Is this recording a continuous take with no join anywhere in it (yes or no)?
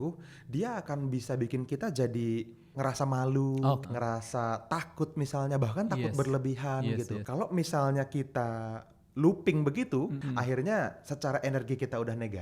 no